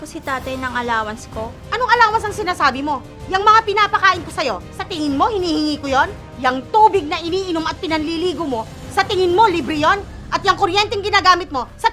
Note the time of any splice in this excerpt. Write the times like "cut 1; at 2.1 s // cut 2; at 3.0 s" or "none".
cut 1; at 1.6 s